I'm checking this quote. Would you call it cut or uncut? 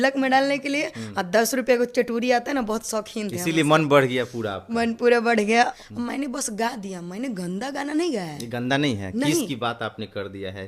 cut